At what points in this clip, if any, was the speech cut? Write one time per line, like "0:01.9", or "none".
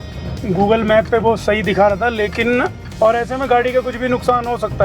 0:02.8